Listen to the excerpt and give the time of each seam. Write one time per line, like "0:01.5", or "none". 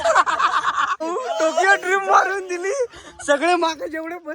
0:01.0